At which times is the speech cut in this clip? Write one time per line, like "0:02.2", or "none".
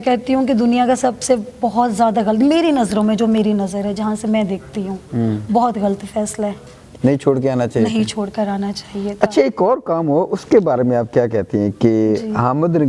none